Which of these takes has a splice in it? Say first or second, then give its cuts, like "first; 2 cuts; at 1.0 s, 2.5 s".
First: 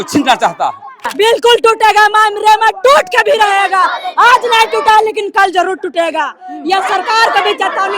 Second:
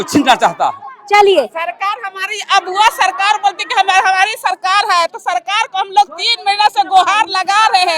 first; 1 cut; at 1.0 s